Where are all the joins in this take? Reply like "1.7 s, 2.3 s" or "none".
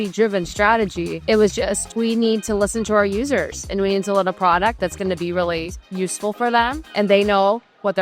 1.1 s, 1.8 s, 6.8 s